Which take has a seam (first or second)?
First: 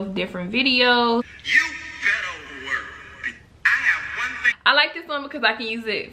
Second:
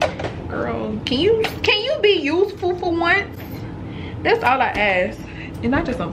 first